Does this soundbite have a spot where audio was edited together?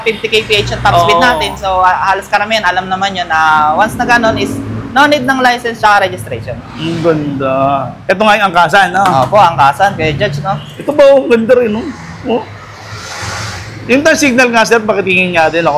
no; 0 cuts

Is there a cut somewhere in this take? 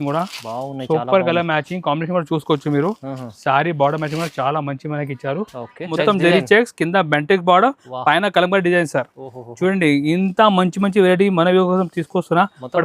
yes; 1 cut; at 5.9 s

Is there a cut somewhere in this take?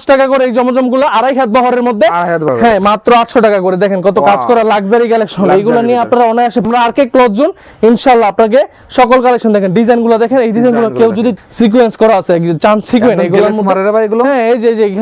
yes; 3 cuts; at 2.5 s, 6.7 s, 11.3 s

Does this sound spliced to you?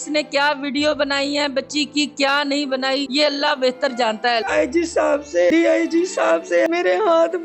yes; 4 cuts; at 3.1 s, 4.4 s, 5.5 s, 6.7 s

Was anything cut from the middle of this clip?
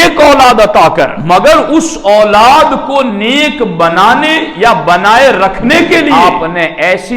yes; 2 cuts; at 1.2 s, 6.1 s

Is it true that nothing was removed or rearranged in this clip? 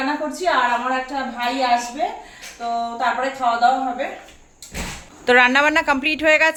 yes; 0 cuts

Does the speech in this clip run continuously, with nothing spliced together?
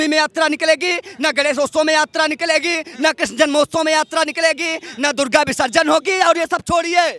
yes; 0 cuts

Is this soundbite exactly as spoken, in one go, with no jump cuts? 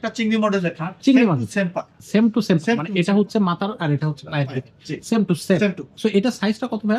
yes; 0 cuts

